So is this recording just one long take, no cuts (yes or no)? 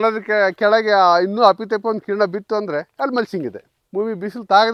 yes